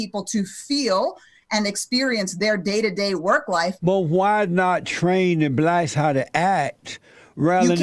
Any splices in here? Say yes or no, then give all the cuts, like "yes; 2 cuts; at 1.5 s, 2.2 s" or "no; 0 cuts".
yes; 1 cut; at 3.8 s